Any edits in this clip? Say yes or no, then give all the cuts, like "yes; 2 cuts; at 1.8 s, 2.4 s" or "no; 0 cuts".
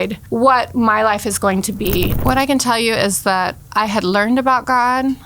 yes; 1 cut; at 2.1 s